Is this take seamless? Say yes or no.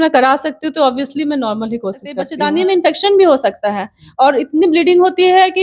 no